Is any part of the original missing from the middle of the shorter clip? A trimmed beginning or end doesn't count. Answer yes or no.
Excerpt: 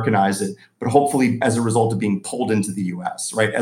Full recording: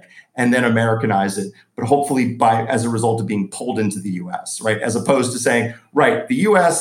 yes